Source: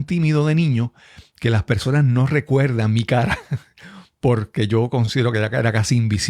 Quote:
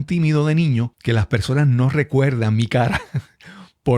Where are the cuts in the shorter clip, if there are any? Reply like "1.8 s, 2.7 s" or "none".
0.9 s